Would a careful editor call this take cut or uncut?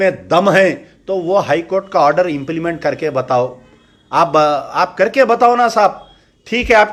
uncut